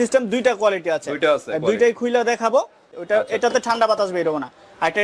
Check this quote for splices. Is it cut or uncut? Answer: cut